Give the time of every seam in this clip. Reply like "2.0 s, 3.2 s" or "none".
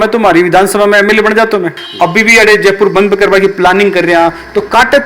1.8 s